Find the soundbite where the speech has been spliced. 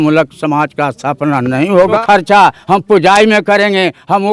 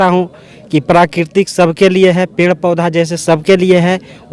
first; 1 cut; at 2.0 s

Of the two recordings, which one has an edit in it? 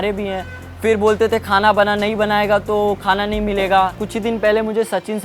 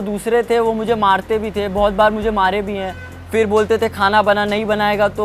first; 1 cut; at 4.0 s

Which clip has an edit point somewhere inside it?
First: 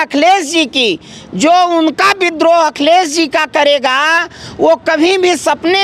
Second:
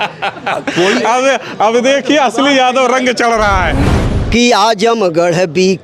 second; 1 cut; at 3.9 s

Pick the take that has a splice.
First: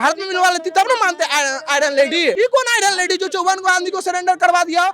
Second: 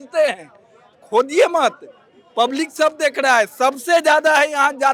first; 1 cut; at 2.4 s

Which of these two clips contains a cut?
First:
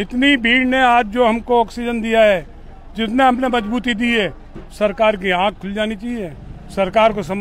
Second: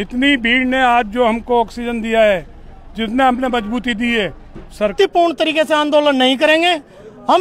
second; 1 cut; at 4.9 s

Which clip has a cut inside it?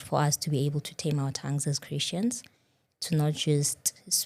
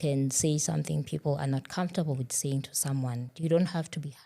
second; 1 cut; at 3.3 s

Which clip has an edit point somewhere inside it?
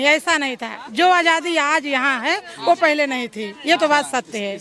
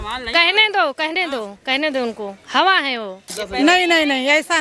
second; 1 cut; at 3.2 s

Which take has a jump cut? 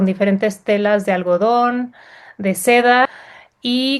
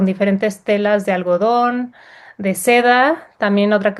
first; 1 cut; at 3.1 s

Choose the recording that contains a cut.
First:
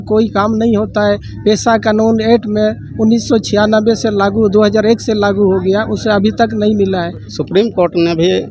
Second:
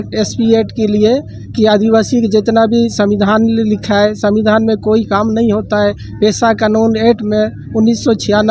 first; 1 cut; at 7.3 s

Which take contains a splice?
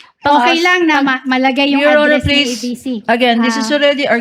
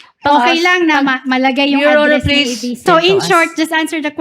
second; 1 cut; at 2.8 s

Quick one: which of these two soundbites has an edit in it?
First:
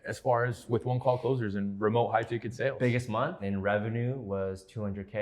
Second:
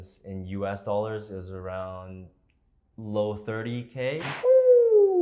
first; 1 cut; at 3.4 s

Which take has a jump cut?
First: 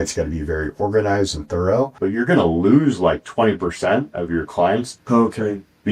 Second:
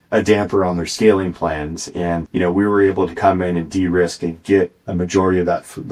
first; 2 cuts; at 1.9 s, 4.9 s

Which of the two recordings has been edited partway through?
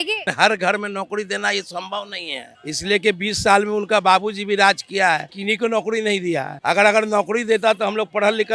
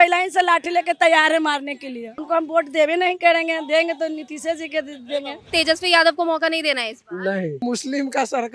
second; 3 cuts; at 2.1 s, 5.5 s, 7.6 s

